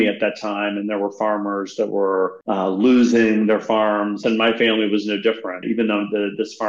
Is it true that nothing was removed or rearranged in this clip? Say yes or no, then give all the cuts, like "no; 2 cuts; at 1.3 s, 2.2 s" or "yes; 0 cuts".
no; 3 cuts; at 2.4 s, 4.2 s, 5.6 s